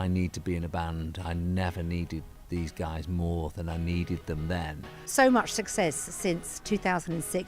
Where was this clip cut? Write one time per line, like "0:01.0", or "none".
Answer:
0:05.1